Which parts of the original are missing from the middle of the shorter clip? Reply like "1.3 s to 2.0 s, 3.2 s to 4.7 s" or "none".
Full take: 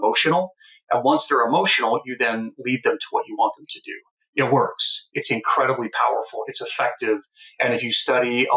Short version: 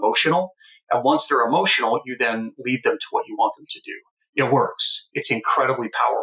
none